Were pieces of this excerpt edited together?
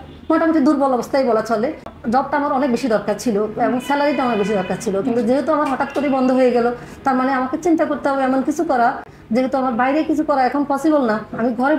no; 0 cuts

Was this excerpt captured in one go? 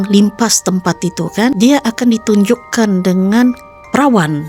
no; 1 cut; at 1.6 s

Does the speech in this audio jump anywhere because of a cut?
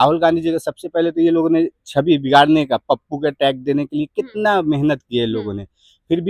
no; 0 cuts

